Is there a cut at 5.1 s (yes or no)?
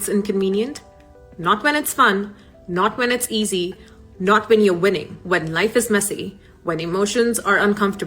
yes